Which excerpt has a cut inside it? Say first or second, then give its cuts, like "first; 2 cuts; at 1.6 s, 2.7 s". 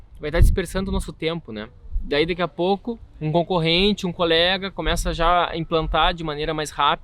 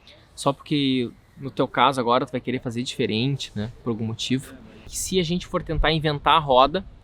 second; 1 cut; at 5.0 s